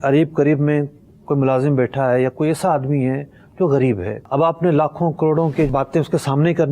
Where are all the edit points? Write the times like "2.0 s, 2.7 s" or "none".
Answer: 4.2 s, 5.7 s